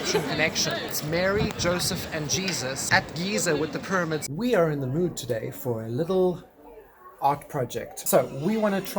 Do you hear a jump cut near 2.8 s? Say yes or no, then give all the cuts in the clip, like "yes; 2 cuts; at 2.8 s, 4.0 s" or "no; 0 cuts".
yes; 4 cuts; at 0.9 s, 2.8 s, 4.2 s, 8.0 s